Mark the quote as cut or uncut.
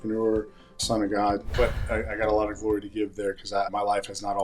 cut